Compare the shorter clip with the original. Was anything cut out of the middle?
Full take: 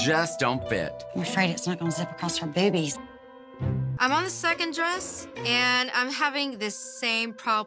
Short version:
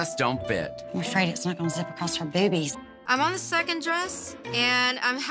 yes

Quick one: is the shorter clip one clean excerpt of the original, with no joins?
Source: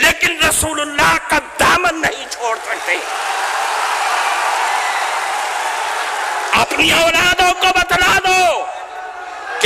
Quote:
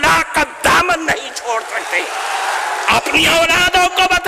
no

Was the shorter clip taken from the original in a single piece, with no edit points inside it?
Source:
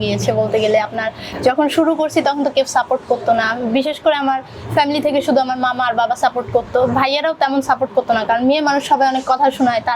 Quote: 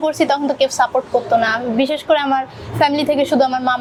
yes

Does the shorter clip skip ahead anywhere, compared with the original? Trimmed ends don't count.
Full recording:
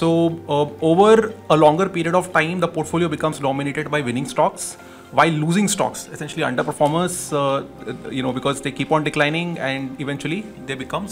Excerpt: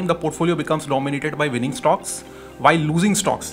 no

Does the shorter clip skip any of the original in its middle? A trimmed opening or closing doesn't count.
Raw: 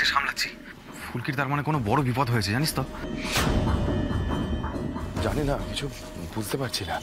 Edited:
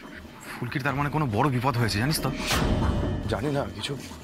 yes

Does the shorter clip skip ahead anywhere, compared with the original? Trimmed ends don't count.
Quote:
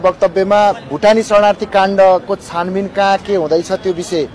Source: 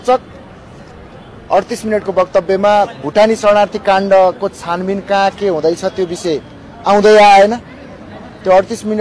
no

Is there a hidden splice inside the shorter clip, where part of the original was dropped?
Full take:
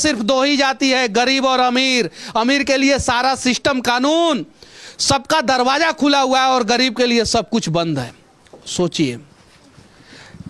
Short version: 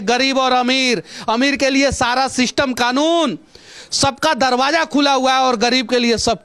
no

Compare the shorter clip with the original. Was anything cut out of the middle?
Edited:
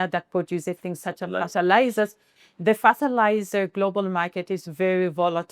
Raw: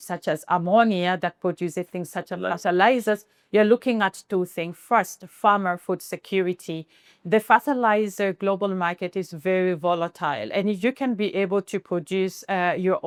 yes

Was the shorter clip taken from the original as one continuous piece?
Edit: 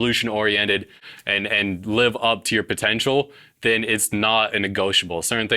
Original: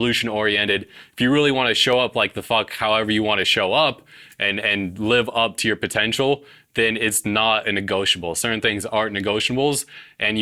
no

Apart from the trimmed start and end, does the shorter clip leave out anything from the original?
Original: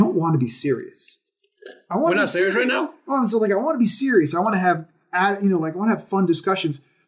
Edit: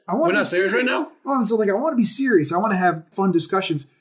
yes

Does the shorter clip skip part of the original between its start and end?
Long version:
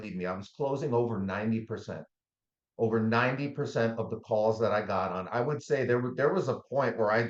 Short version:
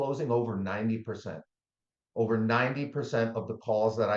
no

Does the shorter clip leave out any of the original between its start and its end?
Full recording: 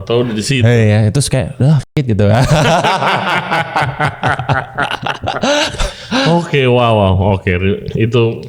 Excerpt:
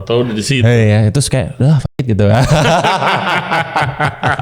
no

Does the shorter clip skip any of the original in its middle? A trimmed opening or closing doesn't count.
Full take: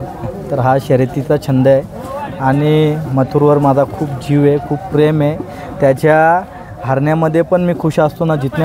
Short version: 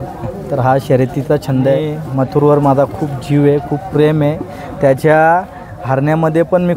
yes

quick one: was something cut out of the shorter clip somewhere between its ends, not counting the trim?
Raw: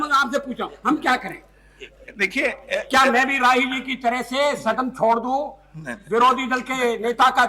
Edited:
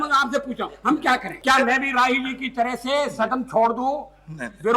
yes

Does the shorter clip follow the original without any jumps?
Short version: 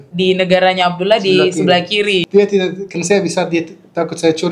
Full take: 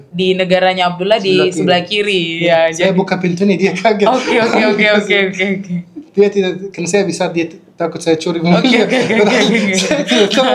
no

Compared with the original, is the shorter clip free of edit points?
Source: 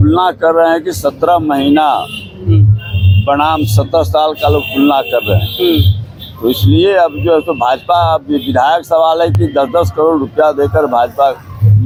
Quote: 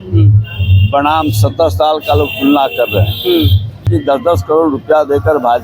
no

